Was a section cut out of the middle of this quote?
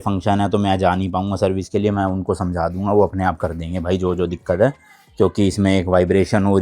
no; 0 cuts

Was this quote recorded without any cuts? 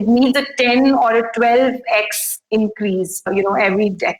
yes; 0 cuts

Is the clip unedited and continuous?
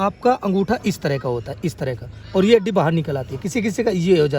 yes; 0 cuts

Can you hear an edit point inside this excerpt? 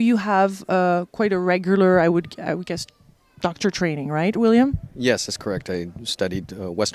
no; 0 cuts

